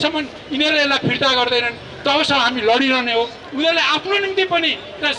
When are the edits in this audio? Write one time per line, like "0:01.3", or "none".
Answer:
0:03.4